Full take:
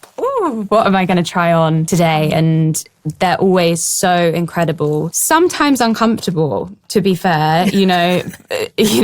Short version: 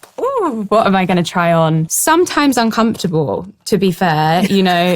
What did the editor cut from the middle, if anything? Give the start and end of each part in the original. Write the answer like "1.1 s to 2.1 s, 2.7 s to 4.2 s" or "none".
1.9 s to 5.1 s